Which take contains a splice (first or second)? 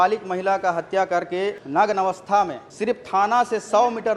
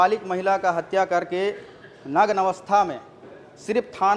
first